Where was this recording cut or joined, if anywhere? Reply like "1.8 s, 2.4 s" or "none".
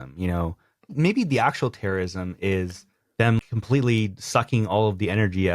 0.9 s, 3.4 s

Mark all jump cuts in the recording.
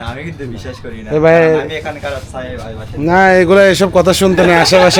none

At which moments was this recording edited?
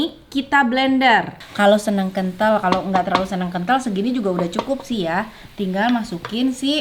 1.4 s

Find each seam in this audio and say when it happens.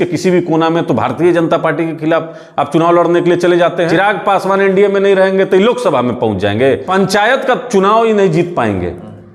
3.9 s, 6.8 s

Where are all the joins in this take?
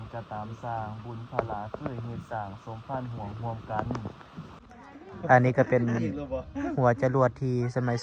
4.6 s

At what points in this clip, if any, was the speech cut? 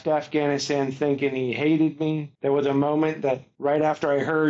2.3 s, 3.5 s

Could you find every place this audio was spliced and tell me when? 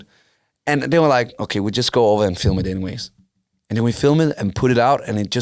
none

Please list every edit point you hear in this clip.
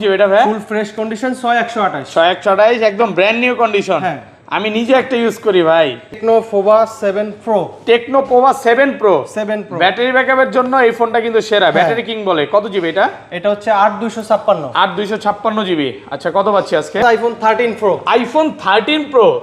6.2 s, 17.0 s

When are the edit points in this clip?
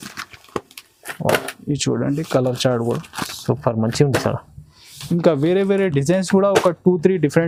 none

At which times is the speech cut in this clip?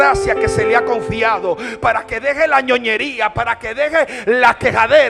none

